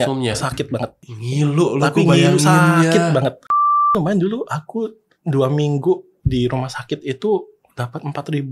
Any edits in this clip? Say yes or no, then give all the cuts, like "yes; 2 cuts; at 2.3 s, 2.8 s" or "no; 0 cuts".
yes; 2 cuts; at 1.1 s, 3.9 s